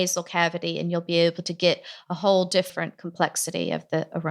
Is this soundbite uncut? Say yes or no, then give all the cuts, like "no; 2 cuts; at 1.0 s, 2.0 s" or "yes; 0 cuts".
no; 1 cut; at 2.7 s